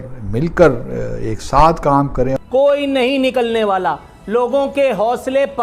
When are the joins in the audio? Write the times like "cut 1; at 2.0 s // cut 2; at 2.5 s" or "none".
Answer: cut 1; at 2.4 s